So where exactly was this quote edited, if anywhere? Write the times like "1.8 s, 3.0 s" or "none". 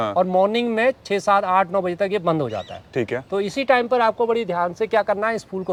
none